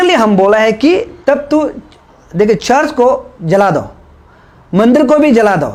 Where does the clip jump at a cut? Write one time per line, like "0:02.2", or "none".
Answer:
none